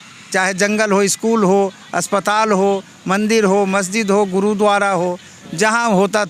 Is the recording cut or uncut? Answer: uncut